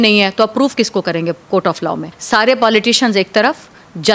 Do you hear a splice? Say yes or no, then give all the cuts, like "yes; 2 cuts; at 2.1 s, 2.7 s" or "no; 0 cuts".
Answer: yes; 1 cut; at 2.1 s